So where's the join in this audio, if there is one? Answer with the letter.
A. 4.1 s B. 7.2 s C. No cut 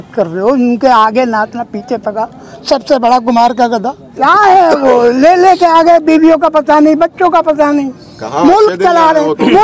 A